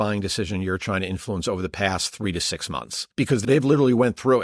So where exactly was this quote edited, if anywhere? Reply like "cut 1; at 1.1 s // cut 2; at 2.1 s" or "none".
cut 1; at 3.4 s